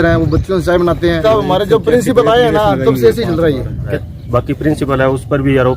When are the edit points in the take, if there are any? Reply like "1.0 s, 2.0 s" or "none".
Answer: 1.2 s, 3.9 s